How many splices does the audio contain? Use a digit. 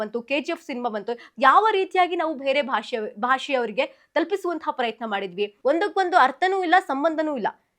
1